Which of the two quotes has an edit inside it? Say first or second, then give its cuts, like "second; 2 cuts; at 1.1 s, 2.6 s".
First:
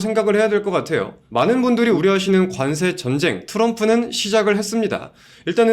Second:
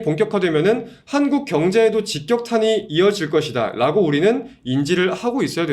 first; 2 cuts; at 1.2 s, 2.0 s